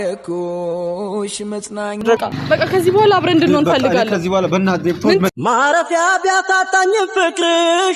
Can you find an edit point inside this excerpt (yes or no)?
yes